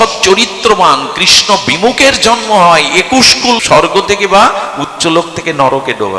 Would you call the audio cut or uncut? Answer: cut